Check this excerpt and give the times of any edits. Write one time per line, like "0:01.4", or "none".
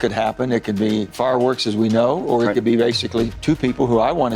0:01.1
0:03.4

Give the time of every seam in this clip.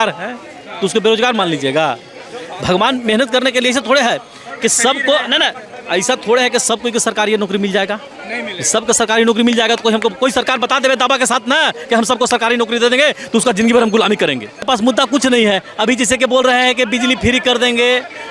0:14.7

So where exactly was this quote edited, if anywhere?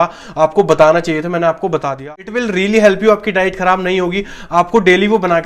0:02.1

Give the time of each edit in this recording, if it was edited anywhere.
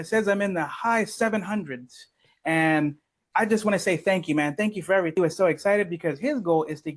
0:05.1

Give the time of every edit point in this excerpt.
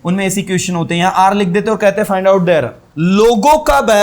0:02.8

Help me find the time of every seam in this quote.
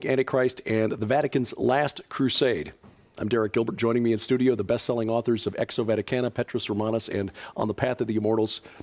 0:05.0

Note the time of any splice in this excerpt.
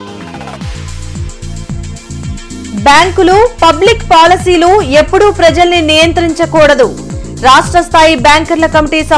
0:00.9

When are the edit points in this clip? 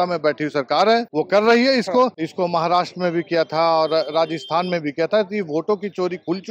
0:01.1
0:02.2

